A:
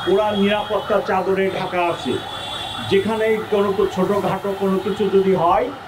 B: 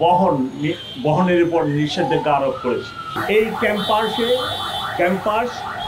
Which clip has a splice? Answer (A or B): B